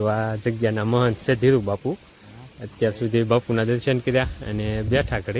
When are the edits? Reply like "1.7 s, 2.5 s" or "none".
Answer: none